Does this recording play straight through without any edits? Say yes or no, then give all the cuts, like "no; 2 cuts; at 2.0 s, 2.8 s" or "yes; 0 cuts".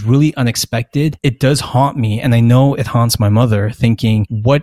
no; 1 cut; at 1.2 s